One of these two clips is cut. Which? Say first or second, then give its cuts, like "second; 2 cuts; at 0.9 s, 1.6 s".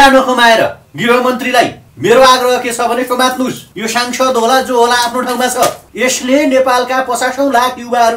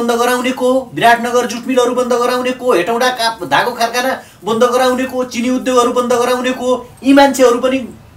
first; 4 cuts; at 0.9 s, 1.8 s, 3.7 s, 5.9 s